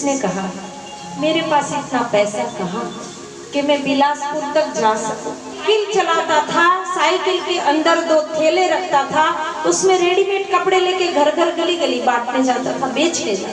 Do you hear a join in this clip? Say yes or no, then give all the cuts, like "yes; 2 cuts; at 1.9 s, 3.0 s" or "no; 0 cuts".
yes; 1 cut; at 5.6 s